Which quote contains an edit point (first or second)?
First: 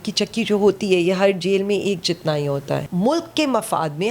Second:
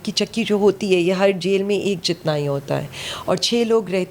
first